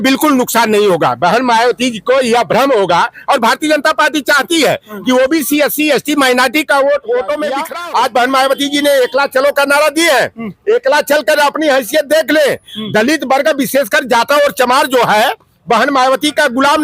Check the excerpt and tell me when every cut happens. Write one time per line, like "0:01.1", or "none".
0:07.6